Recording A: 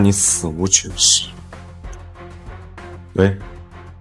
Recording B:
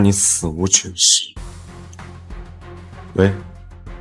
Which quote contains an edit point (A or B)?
A